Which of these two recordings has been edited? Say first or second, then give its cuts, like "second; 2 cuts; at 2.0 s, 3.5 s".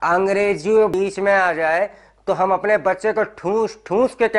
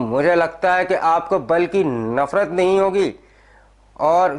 first; 1 cut; at 0.9 s